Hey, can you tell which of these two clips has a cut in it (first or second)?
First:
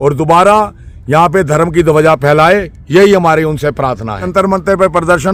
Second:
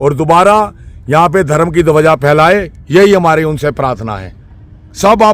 second